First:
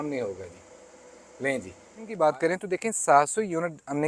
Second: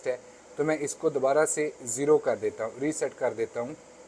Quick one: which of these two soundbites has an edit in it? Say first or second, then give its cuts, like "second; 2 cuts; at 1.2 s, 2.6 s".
first; 1 cut; at 2.0 s